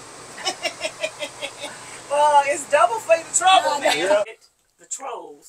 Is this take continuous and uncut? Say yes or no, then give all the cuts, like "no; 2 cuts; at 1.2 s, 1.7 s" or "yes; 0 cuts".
no; 1 cut; at 4.2 s